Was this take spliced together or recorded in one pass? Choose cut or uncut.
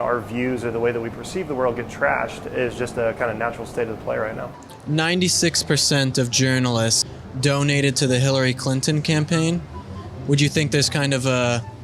cut